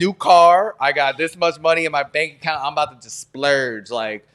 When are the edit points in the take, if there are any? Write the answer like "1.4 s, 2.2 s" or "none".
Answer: none